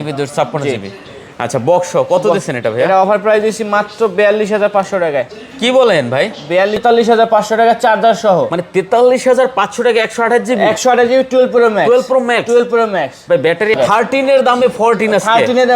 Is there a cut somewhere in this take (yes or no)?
yes